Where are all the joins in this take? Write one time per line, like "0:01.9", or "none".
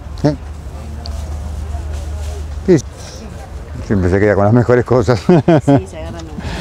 0:02.8